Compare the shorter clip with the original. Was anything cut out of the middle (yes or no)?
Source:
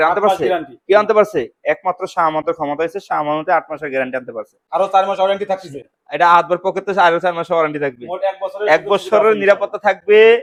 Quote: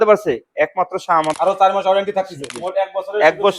yes